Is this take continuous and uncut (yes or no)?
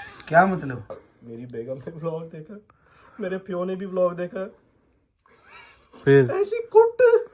no